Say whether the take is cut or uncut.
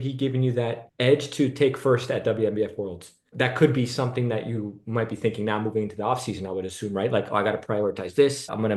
uncut